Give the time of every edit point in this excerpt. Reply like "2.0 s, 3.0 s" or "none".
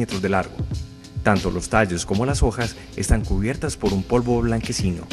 4.0 s